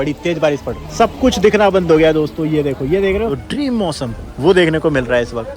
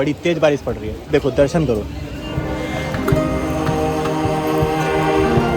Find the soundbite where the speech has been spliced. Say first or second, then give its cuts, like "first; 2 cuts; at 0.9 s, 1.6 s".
first; 2 cuts; at 0.9 s, 3.3 s